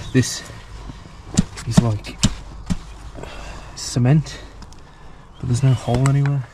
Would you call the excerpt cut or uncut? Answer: uncut